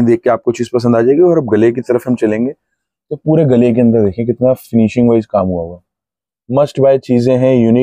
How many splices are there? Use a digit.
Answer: 0